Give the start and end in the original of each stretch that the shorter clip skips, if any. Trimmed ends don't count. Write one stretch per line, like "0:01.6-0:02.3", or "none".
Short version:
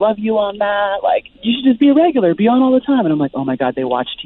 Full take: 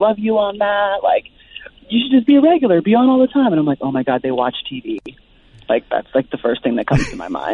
0:01.3-0:01.8